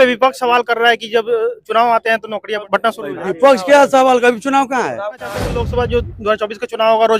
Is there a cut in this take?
yes; 2 cuts; at 2.6 s, 5.5 s

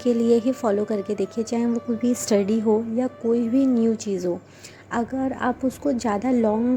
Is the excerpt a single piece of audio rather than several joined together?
yes; 0 cuts

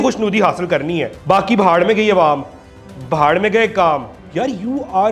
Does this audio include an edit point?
yes; 2 cuts; at 1.1 s, 4.2 s

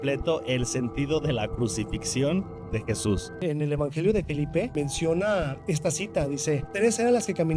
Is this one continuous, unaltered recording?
no; 4 cuts; at 3.4 s, 4.7 s, 5.6 s, 6.7 s

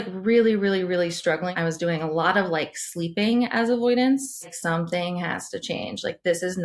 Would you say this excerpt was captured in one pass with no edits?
no; 2 cuts; at 1.5 s, 4.5 s

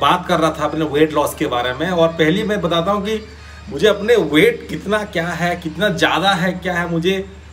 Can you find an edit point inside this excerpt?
no; 0 cuts

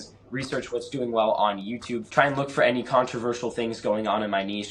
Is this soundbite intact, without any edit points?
no; 1 cut; at 2.0 s

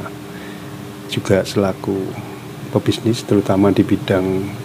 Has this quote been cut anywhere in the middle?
no; 0 cuts

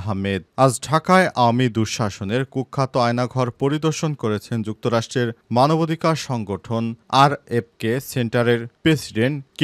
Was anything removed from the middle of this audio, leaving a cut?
no; 0 cuts

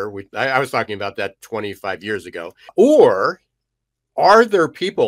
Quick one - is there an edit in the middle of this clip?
yes; 1 cut; at 2.7 s

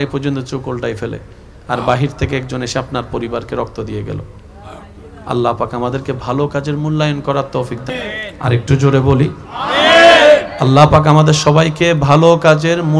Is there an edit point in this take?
yes; 1 cut; at 7.8 s

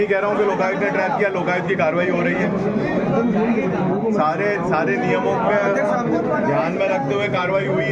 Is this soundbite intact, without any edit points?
yes; 0 cuts

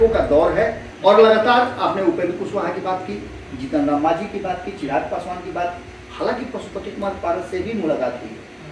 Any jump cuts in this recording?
no; 0 cuts

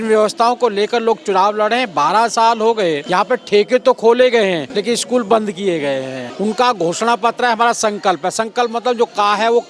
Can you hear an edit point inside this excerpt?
yes; 3 cuts; at 3.0 s, 4.7 s, 6.2 s

